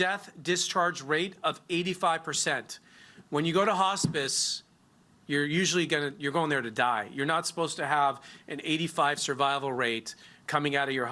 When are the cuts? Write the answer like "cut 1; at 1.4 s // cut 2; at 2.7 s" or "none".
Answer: none